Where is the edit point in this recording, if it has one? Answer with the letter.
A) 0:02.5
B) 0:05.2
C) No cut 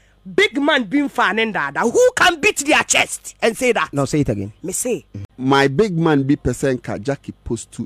B